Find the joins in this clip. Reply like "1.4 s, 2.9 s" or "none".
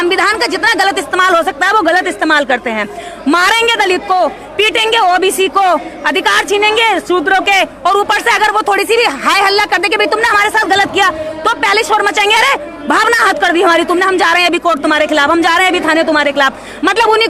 none

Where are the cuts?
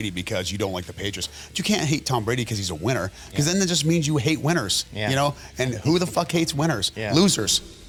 none

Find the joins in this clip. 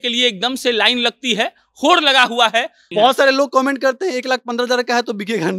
2.9 s

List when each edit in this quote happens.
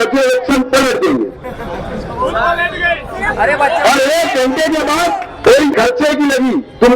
5.7 s

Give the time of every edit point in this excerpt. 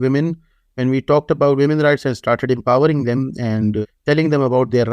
3.8 s

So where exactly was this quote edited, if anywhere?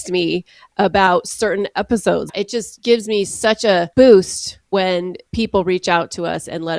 2.3 s, 3.9 s, 5.2 s

